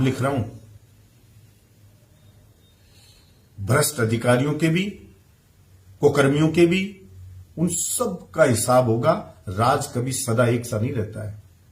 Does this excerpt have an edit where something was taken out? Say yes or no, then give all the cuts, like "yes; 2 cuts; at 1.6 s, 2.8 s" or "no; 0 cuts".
no; 0 cuts